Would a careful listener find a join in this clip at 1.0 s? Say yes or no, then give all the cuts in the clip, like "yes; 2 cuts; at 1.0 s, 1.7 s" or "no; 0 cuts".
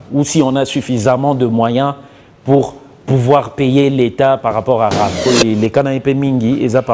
no; 1 cut; at 5.3 s